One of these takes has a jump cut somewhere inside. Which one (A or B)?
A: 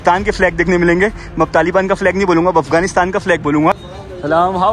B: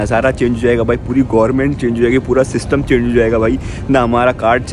A